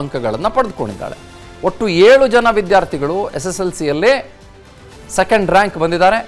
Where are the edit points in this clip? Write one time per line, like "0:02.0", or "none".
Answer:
none

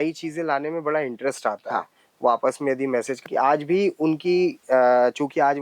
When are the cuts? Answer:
0:03.2

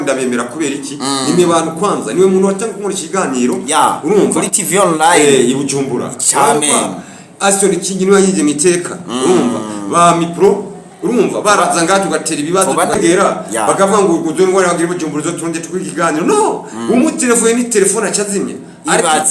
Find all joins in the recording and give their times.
0:13.0

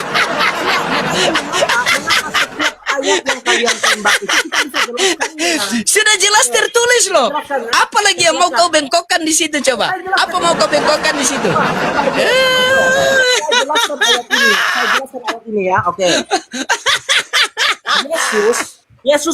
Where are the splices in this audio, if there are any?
none

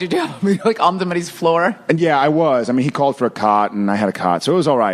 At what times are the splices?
none

